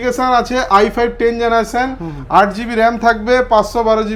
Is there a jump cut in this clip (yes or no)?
no